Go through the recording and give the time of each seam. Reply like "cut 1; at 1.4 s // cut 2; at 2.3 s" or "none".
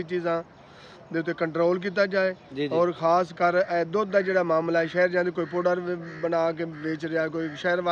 none